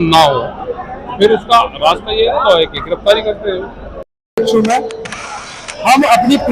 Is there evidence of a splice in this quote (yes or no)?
yes